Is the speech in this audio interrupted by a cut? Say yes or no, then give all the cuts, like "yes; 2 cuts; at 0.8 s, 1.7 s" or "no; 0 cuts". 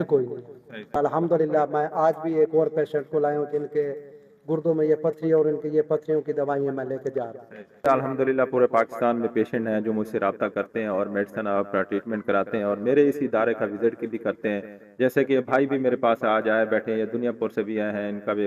yes; 2 cuts; at 0.9 s, 7.8 s